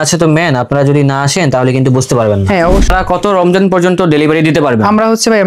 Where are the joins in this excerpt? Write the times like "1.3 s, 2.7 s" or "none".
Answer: 2.9 s